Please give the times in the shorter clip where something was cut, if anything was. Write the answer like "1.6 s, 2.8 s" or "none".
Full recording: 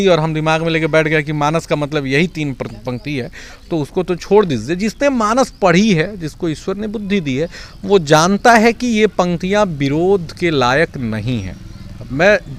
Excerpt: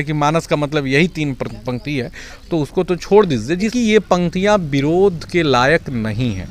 3.7 s